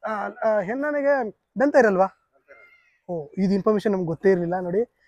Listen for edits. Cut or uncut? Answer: uncut